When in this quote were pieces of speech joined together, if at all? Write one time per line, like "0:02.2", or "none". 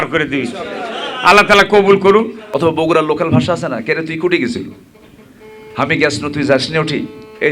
0:02.4